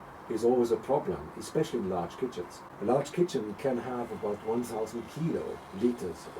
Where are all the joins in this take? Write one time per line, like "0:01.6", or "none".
0:02.6